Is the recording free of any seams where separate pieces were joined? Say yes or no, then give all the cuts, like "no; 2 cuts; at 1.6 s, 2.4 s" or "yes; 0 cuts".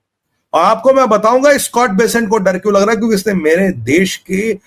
yes; 0 cuts